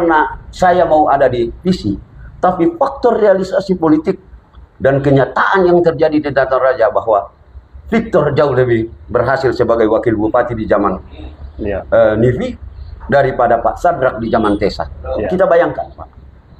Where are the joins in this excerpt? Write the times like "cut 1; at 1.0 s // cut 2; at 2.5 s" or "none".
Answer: cut 1; at 15.3 s